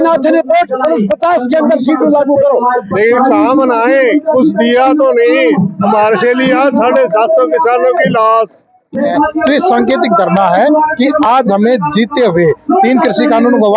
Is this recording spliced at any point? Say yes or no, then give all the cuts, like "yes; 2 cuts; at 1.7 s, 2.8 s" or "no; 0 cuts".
yes; 2 cuts; at 2.9 s, 9.1 s